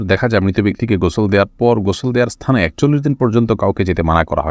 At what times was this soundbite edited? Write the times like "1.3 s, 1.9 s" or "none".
none